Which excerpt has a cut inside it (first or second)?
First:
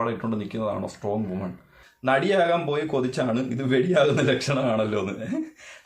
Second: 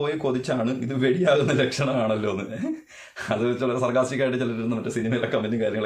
first